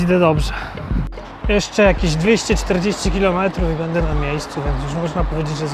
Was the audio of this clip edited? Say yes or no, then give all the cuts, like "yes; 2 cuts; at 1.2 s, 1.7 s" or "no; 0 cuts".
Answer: yes; 1 cut; at 1.0 s